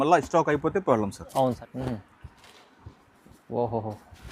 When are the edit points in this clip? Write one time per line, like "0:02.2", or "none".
0:01.6